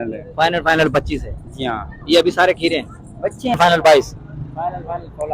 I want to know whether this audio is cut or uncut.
cut